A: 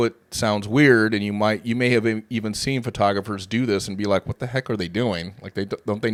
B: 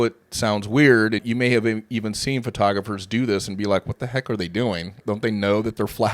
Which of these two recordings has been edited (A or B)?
B